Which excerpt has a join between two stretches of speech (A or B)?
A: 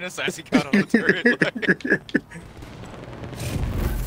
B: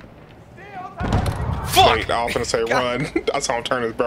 A